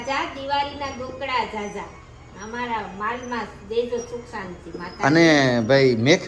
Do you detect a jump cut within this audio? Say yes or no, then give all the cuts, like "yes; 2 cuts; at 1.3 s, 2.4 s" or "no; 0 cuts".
no; 0 cuts